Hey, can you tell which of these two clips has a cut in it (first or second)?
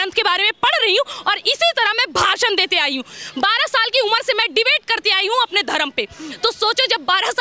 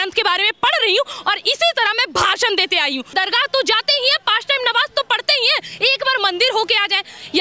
second